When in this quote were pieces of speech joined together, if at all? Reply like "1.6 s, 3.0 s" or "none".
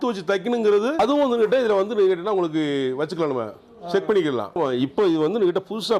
1.0 s, 4.6 s